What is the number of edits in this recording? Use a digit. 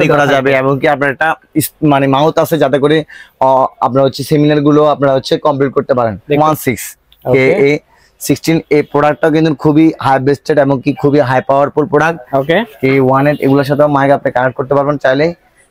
2